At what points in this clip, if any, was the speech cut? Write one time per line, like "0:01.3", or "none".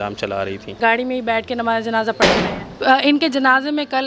0:00.8
0:02.7